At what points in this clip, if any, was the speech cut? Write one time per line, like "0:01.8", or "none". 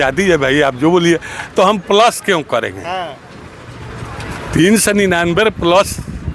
none

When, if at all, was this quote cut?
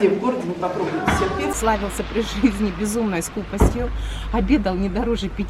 0:01.5

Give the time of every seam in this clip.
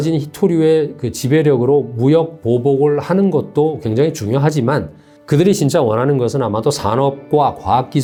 none

